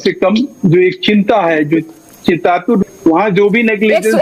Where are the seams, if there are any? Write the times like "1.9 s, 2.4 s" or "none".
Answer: 2.8 s